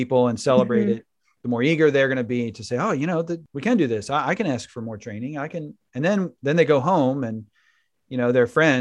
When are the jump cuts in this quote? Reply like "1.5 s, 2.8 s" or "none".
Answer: 3.5 s